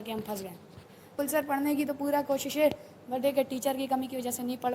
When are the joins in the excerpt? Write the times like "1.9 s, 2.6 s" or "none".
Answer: 1.1 s